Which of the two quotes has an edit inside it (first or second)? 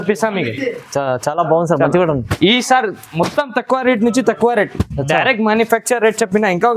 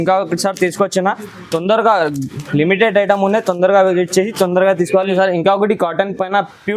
second